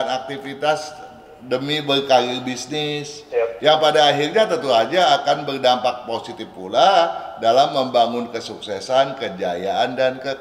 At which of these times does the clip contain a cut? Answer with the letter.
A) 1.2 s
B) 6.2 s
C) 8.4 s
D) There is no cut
D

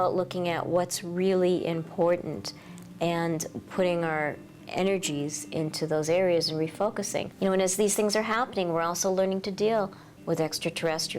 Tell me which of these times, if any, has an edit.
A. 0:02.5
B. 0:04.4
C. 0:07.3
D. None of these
C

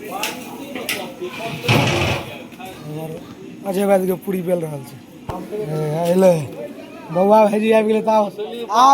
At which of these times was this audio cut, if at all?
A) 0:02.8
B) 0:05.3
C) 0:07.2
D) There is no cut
B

